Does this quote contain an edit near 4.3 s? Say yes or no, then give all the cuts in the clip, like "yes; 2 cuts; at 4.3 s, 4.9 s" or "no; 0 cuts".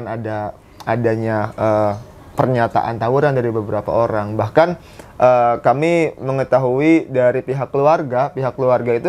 no; 0 cuts